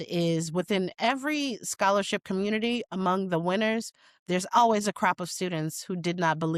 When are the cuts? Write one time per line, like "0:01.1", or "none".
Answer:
none